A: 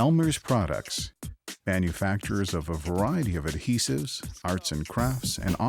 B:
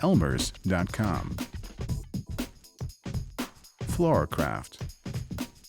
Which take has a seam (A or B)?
B